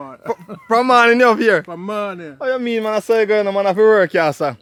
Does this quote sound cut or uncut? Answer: uncut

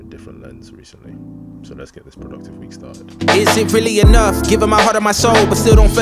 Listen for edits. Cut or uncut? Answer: uncut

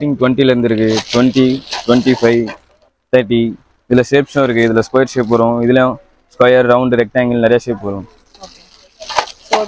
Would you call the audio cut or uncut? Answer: uncut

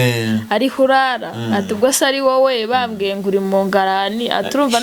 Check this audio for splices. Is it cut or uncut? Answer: uncut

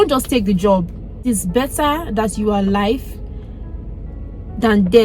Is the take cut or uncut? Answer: cut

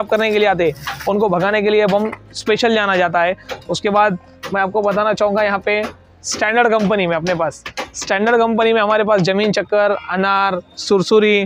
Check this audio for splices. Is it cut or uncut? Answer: uncut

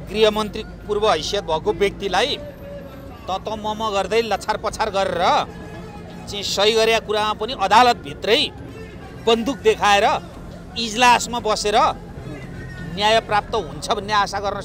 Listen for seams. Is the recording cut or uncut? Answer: uncut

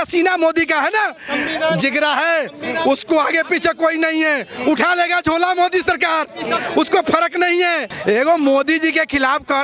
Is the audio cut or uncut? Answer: cut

